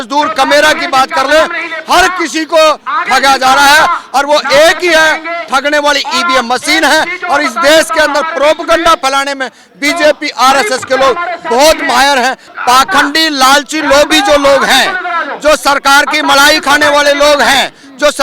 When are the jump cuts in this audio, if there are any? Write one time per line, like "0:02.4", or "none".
0:12.5